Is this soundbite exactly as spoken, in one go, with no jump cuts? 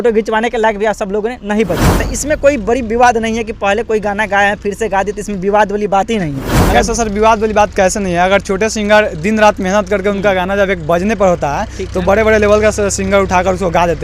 no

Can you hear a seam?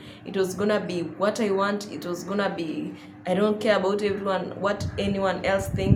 no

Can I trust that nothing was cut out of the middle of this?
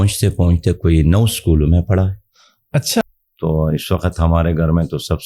no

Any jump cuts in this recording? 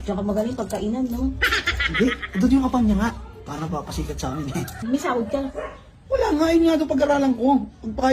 yes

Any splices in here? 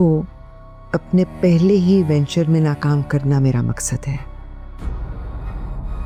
no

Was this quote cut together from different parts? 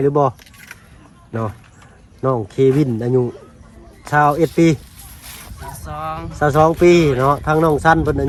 no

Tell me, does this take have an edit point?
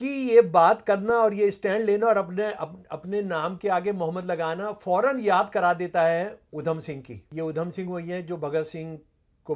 yes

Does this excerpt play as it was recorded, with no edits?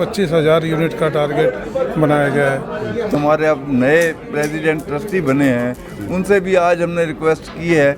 no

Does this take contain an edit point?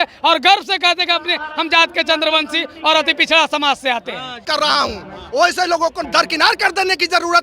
yes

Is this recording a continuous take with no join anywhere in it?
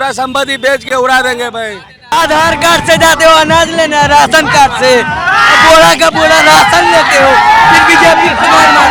no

